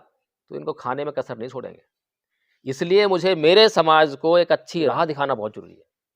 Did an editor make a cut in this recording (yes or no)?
yes